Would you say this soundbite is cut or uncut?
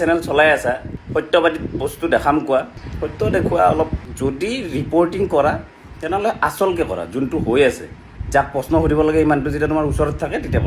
cut